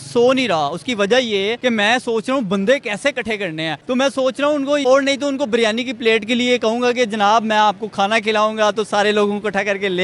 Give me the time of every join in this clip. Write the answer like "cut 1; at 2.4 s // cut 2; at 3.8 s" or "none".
cut 1; at 1.6 s // cut 2; at 3.7 s // cut 3; at 4.8 s